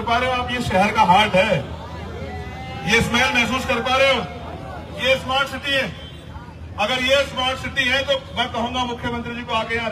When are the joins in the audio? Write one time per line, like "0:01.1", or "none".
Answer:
none